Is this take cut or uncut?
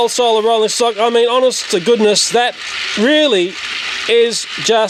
uncut